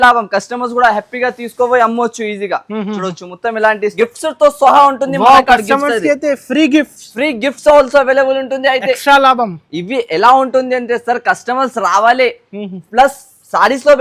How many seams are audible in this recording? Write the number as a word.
one